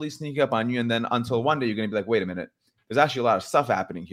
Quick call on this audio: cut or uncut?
uncut